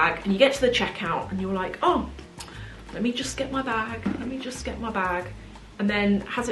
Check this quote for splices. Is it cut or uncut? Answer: uncut